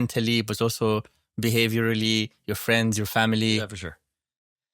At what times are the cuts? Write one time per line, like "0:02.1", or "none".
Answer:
none

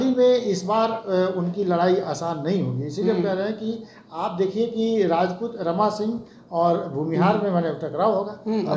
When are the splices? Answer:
none

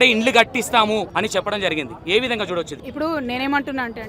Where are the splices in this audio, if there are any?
0:01.1
0:02.8

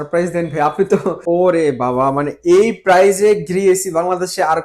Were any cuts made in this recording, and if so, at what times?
0:01.2

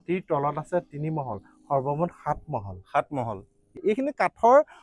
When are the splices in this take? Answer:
0:03.8

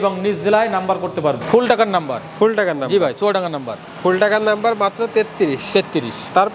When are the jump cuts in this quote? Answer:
0:01.4

